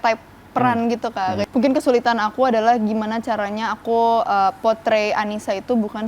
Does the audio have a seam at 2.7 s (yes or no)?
no